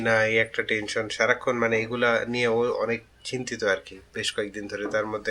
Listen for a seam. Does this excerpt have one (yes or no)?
no